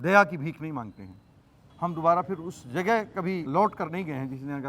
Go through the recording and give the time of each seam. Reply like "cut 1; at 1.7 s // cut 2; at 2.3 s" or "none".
cut 1; at 1.7 s // cut 2; at 3.5 s